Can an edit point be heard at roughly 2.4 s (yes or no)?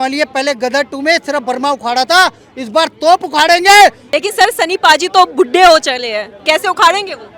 no